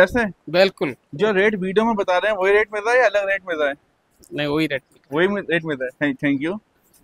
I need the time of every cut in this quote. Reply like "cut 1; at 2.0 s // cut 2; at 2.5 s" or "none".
none